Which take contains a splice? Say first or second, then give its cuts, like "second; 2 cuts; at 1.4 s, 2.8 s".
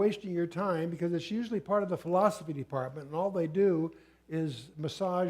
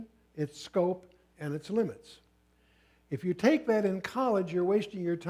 first; 1 cut; at 4.0 s